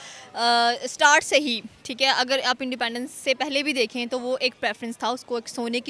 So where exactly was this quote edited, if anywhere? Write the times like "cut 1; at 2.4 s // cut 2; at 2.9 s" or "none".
none